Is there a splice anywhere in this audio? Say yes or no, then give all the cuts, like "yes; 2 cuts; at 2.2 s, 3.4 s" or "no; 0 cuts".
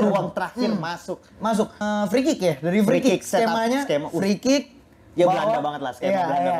yes; 1 cut; at 1.8 s